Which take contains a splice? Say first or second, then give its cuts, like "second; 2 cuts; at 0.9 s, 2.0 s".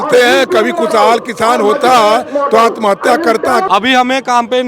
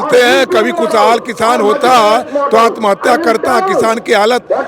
first; 1 cut; at 3.7 s